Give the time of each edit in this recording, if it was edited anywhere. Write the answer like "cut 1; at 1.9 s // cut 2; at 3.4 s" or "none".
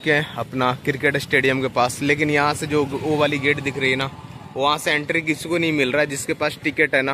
none